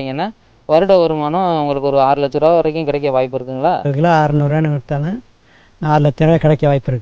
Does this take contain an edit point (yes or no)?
yes